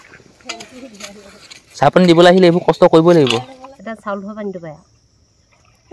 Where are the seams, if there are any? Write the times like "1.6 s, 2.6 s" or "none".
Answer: 3.6 s